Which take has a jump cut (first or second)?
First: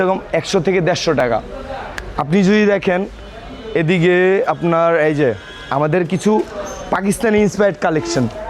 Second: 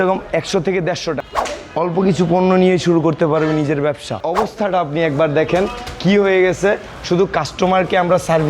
second